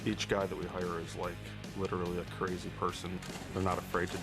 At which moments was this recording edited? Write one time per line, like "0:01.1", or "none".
0:03.1